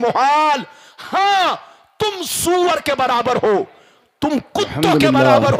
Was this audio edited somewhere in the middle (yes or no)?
no